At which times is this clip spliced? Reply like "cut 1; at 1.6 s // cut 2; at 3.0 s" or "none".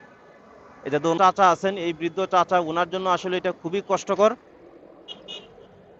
cut 1; at 1.2 s